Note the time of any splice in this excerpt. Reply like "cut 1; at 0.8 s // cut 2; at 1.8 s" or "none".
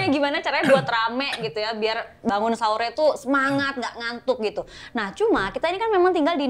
none